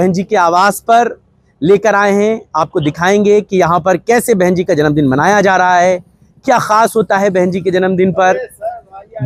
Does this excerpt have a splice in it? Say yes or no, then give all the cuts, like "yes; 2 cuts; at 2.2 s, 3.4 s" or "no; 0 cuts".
no; 0 cuts